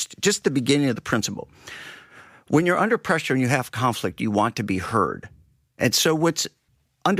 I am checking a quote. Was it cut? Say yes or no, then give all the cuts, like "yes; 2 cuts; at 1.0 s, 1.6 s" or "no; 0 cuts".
no; 0 cuts